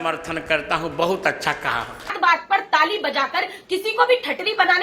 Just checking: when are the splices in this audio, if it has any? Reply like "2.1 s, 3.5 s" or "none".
2.1 s